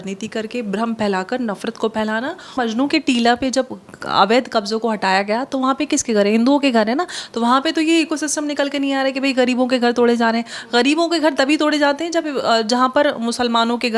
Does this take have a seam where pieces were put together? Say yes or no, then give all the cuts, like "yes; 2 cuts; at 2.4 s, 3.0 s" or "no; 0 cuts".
yes; 1 cut; at 2.5 s